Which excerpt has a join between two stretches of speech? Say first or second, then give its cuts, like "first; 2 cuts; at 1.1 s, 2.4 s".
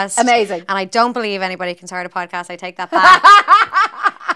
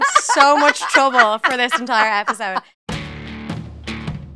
second; 1 cut; at 2.8 s